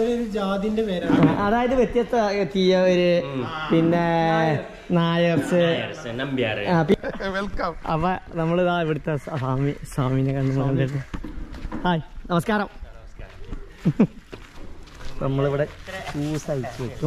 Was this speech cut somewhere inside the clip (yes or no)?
yes